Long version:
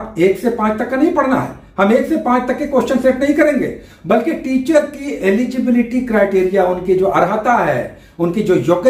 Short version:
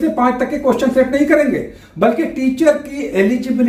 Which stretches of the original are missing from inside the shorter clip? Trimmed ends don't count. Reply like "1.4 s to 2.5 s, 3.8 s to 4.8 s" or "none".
none